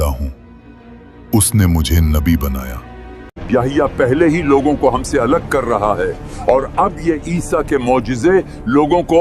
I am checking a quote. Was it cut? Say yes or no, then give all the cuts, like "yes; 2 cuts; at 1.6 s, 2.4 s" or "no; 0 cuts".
yes; 1 cut; at 3.3 s